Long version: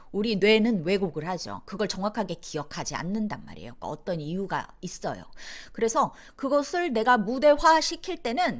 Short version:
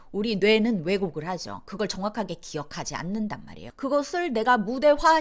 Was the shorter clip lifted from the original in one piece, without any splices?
no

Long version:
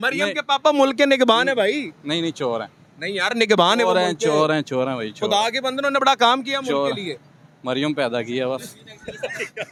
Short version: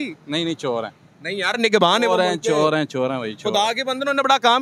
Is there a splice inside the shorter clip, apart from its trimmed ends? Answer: no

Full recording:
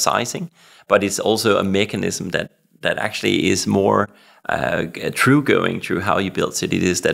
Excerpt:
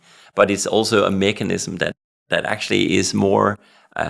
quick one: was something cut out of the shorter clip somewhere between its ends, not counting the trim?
no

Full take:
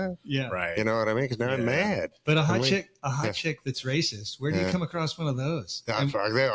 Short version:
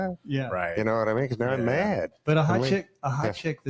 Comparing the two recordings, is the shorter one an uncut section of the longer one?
yes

